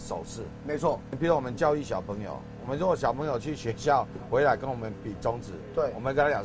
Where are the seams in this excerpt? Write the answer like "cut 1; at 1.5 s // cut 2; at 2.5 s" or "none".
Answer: cut 1; at 1.1 s